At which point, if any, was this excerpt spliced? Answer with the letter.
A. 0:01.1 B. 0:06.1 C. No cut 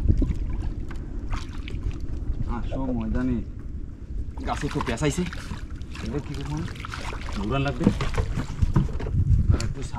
C